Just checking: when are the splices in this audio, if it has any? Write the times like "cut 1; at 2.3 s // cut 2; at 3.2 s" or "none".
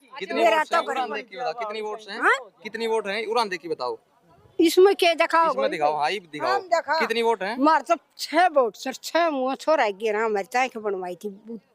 none